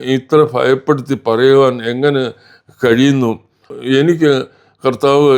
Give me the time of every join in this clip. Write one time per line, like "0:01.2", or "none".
0:03.7